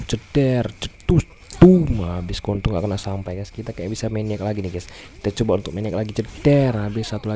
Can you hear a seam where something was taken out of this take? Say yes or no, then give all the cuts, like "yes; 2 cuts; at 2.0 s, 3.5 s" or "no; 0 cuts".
no; 0 cuts